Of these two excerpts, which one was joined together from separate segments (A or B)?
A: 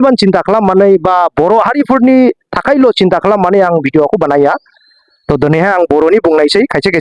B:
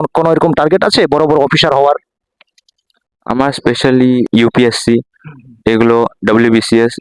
B